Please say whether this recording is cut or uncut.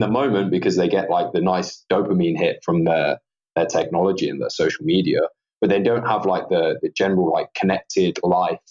uncut